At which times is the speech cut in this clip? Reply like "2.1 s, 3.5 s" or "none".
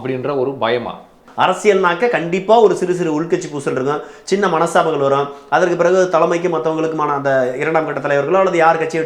1.2 s